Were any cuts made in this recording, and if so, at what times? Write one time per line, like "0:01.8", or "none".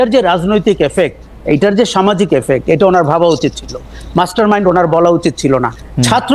none